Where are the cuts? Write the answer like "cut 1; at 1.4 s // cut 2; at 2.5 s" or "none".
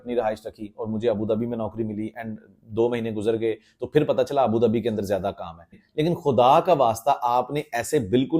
cut 1; at 5.8 s